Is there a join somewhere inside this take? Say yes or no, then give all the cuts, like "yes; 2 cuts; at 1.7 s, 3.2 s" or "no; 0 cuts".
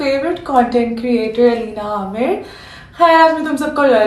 yes; 1 cut; at 2.8 s